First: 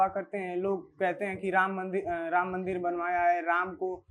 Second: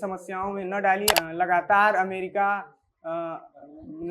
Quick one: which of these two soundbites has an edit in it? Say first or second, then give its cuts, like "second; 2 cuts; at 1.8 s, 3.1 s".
second; 1 cut; at 1.1 s